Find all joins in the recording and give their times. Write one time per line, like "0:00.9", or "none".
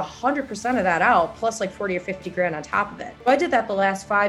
0:03.2